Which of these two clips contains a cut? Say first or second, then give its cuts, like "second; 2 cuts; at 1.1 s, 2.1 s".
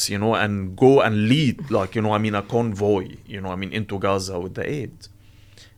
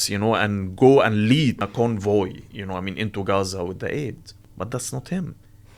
second; 2 cuts; at 1.6 s, 4.5 s